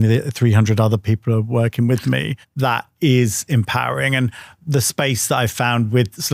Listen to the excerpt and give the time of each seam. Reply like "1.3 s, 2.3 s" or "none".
none